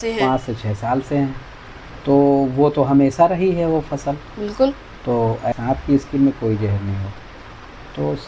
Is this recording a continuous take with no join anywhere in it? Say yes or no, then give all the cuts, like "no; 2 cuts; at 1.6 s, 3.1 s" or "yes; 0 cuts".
no; 1 cut; at 5.5 s